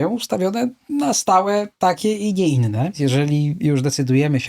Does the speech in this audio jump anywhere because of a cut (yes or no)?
yes